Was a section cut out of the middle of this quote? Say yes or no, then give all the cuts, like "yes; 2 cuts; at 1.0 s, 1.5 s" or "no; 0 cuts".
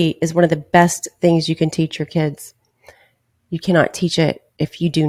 no; 0 cuts